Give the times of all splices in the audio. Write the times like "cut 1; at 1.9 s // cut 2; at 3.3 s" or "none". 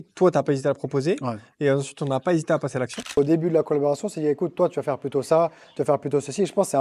cut 1; at 3.2 s